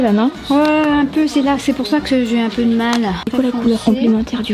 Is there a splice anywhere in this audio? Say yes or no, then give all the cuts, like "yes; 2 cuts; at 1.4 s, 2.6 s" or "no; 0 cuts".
yes; 1 cut; at 3.2 s